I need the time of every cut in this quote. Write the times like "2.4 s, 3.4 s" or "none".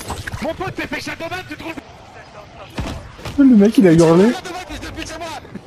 none